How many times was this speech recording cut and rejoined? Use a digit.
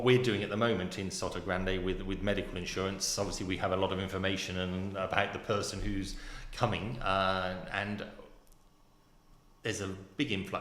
0